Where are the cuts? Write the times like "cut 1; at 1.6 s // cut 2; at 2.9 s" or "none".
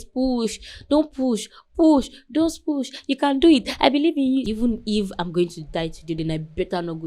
cut 1; at 4.5 s